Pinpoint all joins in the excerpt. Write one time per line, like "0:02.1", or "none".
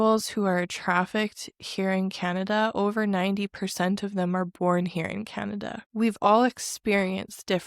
0:05.8